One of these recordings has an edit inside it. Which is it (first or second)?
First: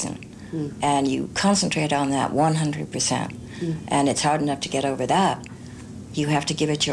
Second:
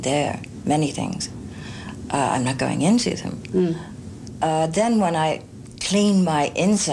second